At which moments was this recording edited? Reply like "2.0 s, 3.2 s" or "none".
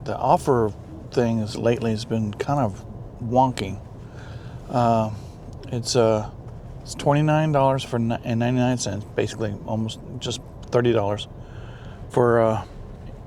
none